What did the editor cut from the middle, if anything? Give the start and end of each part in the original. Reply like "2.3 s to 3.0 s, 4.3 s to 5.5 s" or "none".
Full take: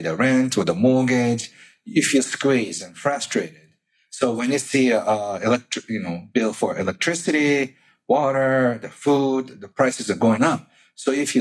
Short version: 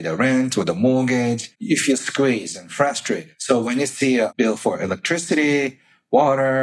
1.5 s to 1.8 s, 3.6 s to 4.0 s, 5.0 s to 6.3 s

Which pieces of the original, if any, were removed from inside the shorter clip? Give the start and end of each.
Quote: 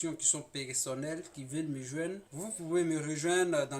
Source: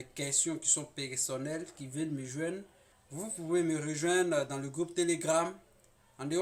2.7 s to 3.1 s

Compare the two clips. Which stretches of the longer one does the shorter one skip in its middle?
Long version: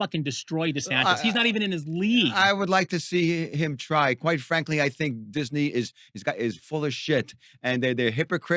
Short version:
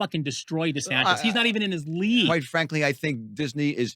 2.3 s to 4.3 s

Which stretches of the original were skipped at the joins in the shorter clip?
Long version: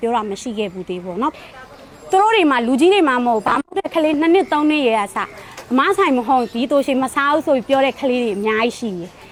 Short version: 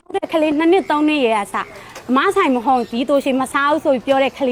none

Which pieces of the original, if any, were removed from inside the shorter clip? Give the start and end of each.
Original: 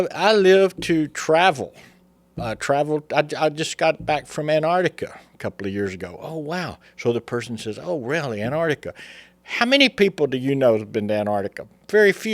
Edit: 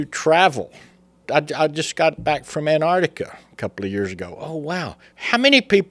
2.3 s to 3.1 s, 6.8 s to 9.3 s

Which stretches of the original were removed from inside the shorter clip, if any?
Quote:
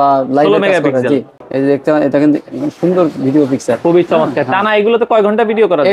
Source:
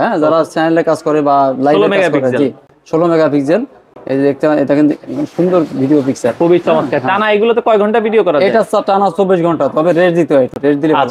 2.7 s to 3.9 s

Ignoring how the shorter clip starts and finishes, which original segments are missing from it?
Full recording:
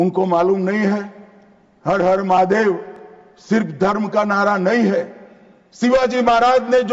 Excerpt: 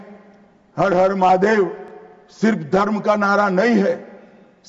none

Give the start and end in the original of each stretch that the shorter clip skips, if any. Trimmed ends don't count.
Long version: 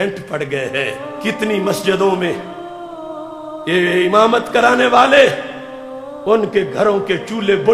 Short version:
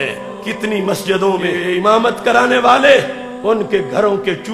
2.4 s to 3.9 s, 5.5 s to 6.1 s

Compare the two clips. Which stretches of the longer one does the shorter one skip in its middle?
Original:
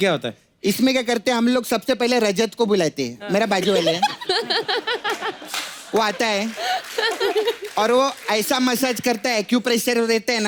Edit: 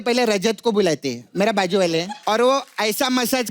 4.0 s to 7.5 s

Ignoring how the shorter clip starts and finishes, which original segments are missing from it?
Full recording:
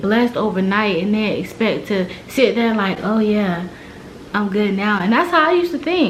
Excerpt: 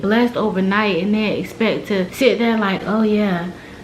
2.1 s to 2.3 s

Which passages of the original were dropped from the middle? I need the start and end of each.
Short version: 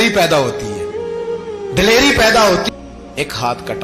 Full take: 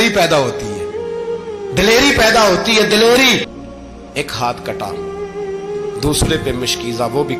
2.7 s to 3.7 s

